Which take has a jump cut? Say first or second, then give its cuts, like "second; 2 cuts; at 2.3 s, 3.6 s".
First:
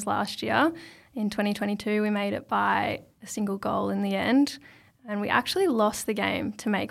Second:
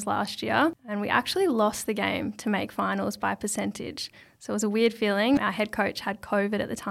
second; 2 cuts; at 0.8 s, 5.4 s